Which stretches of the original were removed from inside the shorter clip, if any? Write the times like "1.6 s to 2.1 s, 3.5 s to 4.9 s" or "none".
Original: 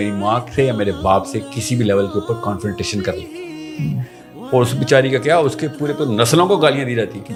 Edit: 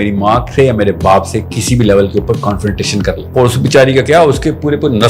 3.2 s to 4.4 s